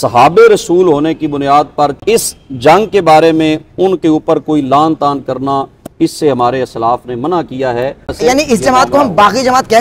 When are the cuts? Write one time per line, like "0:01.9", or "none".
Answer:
0:02.0
0:08.1

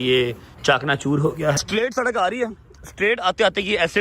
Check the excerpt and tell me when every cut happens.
0:01.6

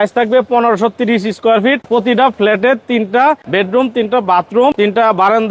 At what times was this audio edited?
0:01.8
0:03.4
0:04.7

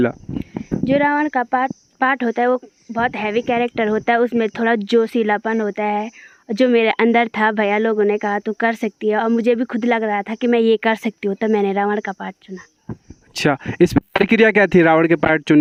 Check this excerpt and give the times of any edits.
none

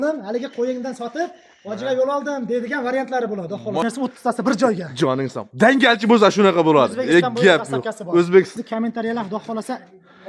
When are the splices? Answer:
0:03.8
0:08.5

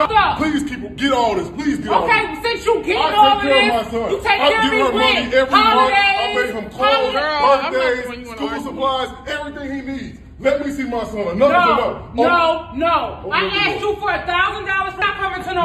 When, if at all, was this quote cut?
0:03.9

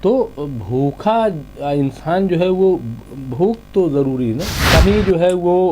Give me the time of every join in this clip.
0:04.5

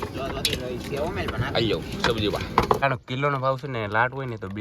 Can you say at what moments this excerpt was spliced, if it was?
0:02.8

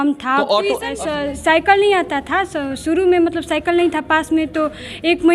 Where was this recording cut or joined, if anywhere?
0:00.9

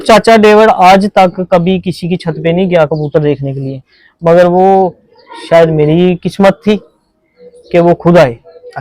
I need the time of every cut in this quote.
none

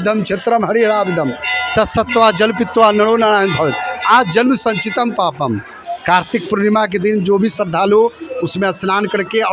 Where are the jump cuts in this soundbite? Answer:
none

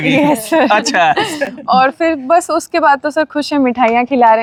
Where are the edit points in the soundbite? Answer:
none

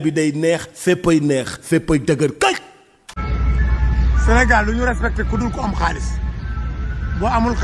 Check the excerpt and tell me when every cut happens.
0:03.1

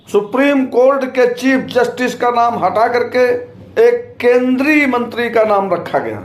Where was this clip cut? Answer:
0:03.6

